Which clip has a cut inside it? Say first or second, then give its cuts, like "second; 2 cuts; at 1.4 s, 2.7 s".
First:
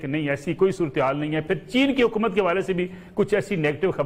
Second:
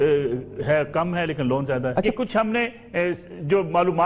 second; 1 cut; at 2.1 s